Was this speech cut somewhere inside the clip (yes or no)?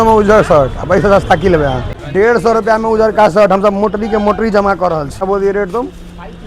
yes